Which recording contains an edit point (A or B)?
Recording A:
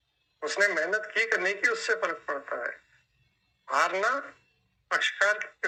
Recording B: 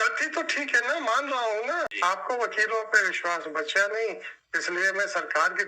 B